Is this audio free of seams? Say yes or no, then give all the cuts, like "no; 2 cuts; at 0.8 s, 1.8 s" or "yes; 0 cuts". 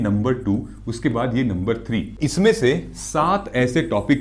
no; 1 cut; at 2.2 s